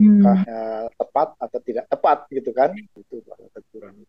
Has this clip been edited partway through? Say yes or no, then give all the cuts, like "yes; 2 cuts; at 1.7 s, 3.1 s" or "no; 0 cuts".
yes; 1 cut; at 2.9 s